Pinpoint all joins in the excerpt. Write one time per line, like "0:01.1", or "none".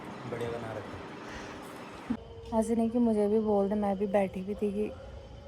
0:02.3